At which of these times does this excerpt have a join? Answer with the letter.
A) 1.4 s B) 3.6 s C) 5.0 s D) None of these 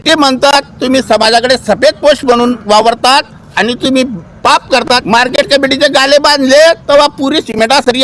C